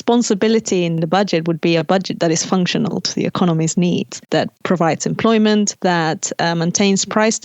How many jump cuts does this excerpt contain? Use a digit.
3